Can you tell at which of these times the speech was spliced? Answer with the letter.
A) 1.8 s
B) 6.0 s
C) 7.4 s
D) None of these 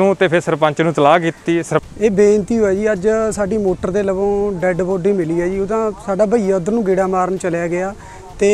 A